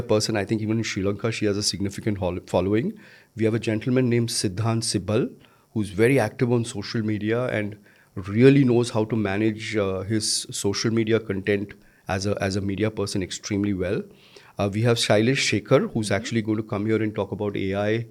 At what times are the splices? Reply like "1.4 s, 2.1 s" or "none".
none